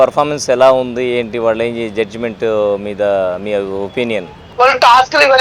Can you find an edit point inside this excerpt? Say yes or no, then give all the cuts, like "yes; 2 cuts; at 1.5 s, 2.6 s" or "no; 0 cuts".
yes; 1 cut; at 4.4 s